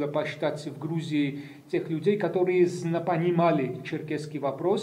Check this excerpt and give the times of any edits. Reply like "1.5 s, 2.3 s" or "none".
none